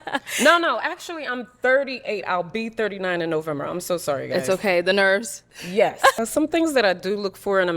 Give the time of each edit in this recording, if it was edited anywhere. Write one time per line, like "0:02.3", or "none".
0:06.2

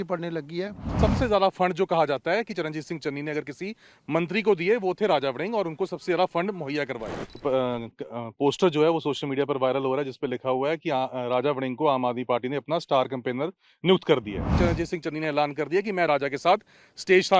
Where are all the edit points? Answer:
0:01.0
0:07.3
0:14.5

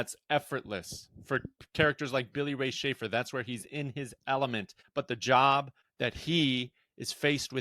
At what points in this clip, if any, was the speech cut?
0:04.8
0:05.8

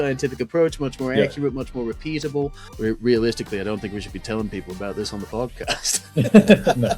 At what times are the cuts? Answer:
0:02.6

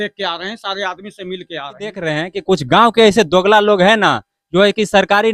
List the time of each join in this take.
0:02.1

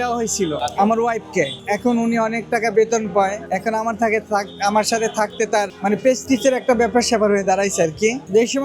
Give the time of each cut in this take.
none

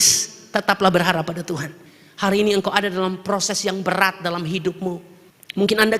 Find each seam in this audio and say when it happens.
none

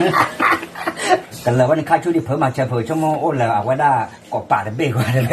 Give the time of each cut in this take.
0:01.2

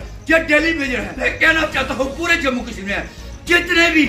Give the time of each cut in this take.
0:01.2

